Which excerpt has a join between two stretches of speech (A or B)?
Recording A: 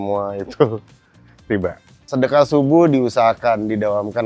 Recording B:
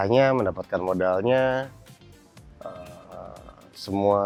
A